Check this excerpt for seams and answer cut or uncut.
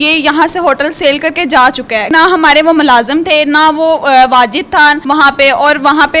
uncut